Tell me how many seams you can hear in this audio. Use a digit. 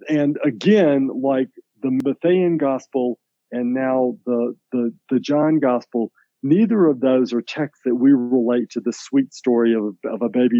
1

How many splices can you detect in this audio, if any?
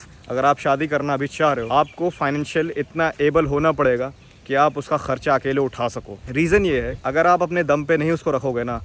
0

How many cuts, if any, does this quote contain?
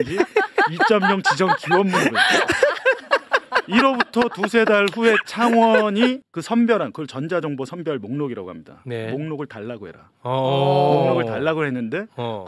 1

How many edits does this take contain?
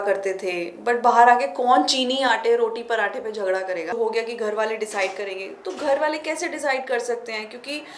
1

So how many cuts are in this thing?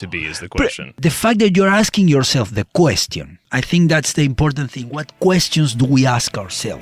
1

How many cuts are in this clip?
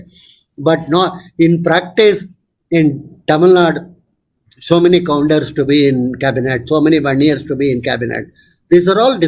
0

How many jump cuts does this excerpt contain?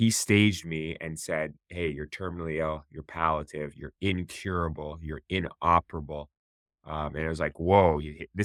0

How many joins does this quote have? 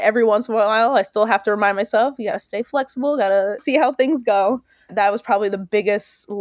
2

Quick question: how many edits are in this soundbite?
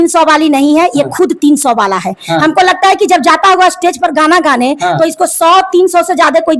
0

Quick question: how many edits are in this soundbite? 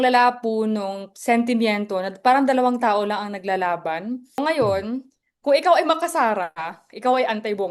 1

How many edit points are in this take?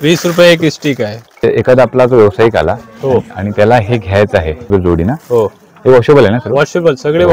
2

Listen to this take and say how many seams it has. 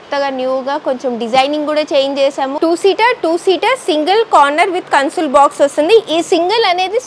1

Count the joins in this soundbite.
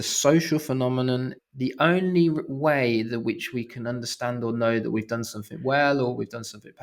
1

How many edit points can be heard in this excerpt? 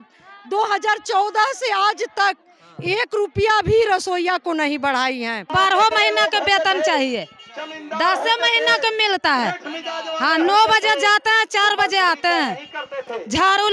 1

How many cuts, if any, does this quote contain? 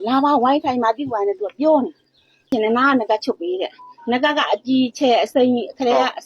1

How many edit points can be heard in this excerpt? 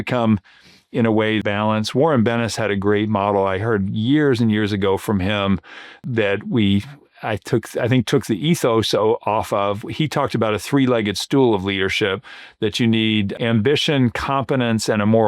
3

